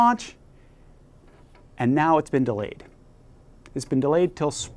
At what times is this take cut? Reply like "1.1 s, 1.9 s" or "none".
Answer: none